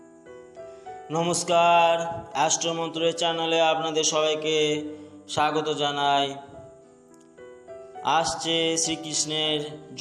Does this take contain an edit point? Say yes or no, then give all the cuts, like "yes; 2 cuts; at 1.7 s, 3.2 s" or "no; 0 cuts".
yes; 1 cut; at 1.1 s